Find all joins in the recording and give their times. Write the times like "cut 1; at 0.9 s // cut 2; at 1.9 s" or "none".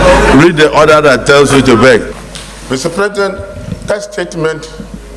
cut 1; at 2.1 s